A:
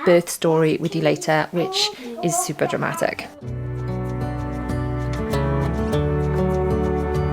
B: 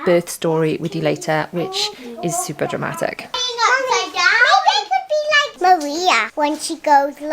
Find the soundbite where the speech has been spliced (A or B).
B